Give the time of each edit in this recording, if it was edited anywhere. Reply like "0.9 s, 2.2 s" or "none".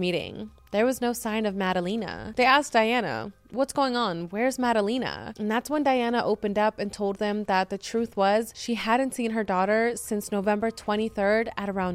2.2 s, 8.6 s